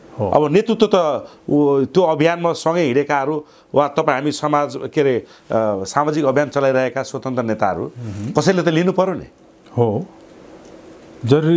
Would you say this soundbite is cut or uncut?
uncut